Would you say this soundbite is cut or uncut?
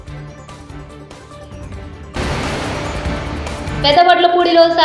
cut